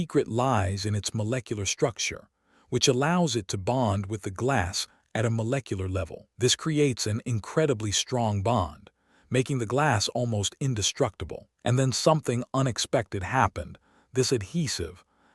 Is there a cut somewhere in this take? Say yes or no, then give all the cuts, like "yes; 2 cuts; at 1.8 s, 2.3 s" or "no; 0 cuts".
no; 0 cuts